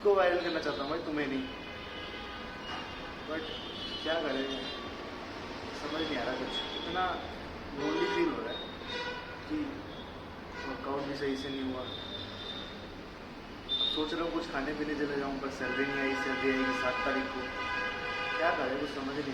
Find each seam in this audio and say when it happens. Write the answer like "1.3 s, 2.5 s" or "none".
none